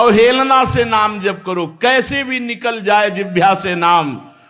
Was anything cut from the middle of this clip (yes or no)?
no